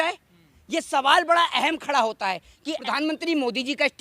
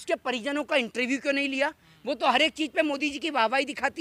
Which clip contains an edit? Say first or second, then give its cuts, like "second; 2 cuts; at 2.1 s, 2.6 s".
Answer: first; 1 cut; at 2.8 s